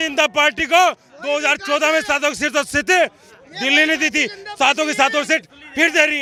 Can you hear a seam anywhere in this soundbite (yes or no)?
no